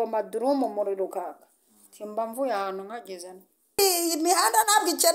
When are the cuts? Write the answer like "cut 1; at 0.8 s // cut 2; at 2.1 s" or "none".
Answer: cut 1; at 3.8 s